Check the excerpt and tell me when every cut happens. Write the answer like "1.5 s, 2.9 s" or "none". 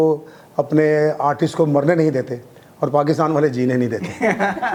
none